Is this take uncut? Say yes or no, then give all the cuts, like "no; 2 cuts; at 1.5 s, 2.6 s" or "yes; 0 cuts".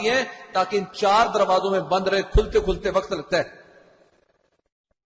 yes; 0 cuts